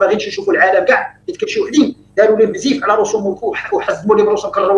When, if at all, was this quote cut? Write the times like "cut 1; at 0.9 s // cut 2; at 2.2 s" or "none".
none